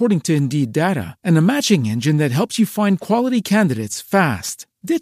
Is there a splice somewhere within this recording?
no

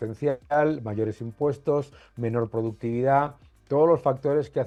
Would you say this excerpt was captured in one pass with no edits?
yes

